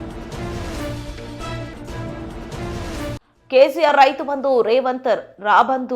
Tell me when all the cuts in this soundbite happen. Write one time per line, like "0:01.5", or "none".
0:03.1